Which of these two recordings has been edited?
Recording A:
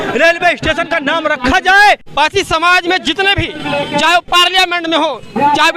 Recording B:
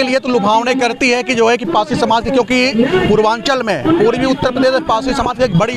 A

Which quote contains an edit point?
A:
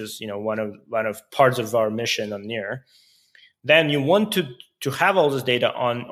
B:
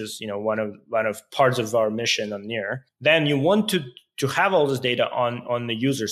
B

